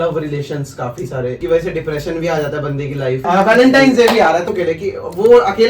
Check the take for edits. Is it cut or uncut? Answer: cut